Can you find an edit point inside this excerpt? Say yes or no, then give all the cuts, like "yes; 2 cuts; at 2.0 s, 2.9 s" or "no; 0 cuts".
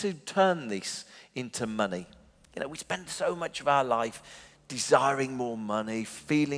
no; 0 cuts